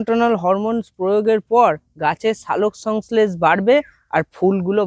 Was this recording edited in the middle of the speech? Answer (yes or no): no